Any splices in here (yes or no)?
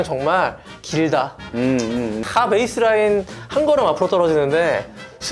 yes